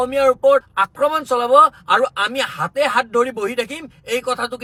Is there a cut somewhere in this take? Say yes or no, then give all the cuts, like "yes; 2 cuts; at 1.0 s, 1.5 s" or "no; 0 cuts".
no; 0 cuts